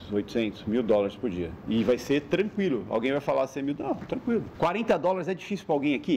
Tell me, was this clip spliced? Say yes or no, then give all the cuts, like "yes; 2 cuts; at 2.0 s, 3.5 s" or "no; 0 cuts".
yes; 2 cuts; at 1.5 s, 4.5 s